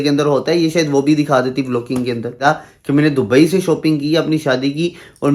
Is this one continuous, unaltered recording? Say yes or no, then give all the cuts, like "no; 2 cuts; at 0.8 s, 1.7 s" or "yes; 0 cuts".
no; 1 cut; at 2.4 s